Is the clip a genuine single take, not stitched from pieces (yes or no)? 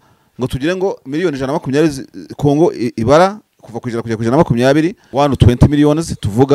no